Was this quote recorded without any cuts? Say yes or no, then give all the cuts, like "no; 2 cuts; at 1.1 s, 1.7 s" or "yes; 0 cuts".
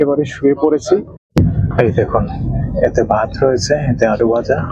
no; 1 cut; at 1.2 s